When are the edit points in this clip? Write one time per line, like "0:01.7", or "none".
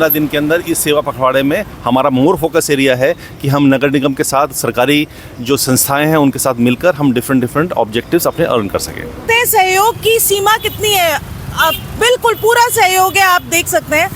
0:09.2